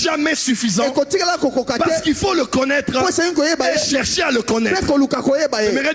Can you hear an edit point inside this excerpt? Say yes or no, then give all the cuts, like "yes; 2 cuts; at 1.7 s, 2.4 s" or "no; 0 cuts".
no; 0 cuts